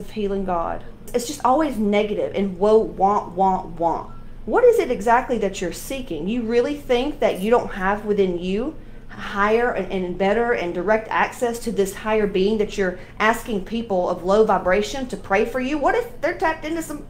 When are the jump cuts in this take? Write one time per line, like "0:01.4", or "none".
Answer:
0:04.3